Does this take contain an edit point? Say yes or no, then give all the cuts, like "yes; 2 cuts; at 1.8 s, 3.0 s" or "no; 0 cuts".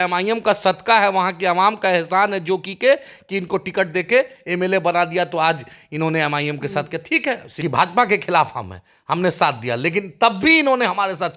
yes; 1 cut; at 7.5 s